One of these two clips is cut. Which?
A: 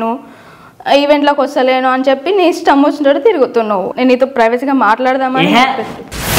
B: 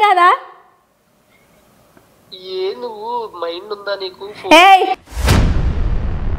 A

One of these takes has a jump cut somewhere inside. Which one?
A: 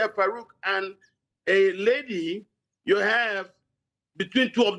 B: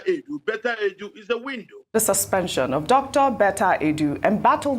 B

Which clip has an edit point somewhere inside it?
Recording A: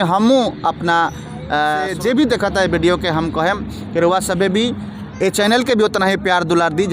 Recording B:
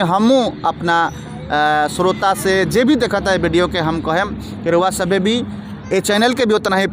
A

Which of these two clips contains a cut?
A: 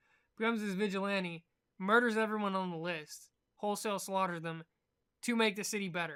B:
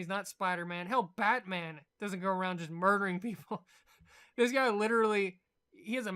B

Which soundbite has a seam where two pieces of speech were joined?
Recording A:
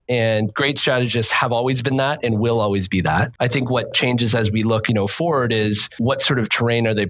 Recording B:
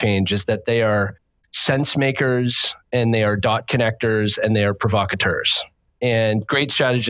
A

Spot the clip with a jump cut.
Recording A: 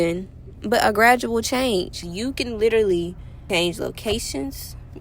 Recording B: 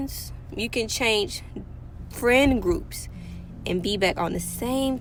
A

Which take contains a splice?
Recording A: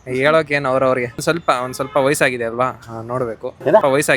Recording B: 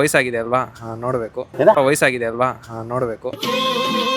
A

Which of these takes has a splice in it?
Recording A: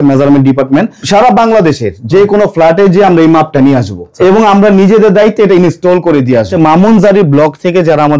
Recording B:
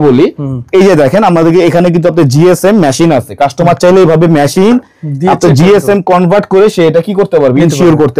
A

